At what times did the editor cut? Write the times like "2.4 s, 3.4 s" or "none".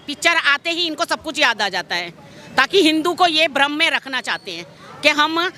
none